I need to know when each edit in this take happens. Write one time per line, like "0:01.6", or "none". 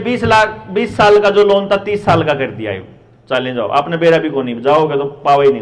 none